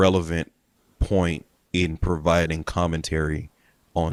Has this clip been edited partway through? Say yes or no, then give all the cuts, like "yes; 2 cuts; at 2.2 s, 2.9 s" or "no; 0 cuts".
no; 0 cuts